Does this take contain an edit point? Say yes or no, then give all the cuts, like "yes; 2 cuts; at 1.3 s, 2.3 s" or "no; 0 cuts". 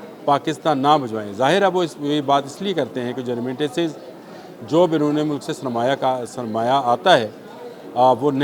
no; 0 cuts